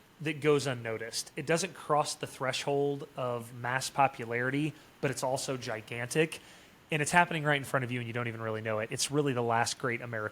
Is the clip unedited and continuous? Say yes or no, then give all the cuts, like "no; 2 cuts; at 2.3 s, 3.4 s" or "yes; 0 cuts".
yes; 0 cuts